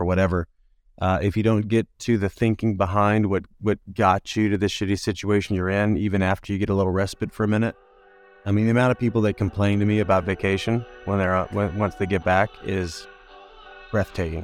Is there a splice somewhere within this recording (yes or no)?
no